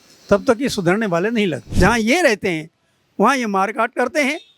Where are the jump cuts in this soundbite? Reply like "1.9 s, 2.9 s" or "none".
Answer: 1.7 s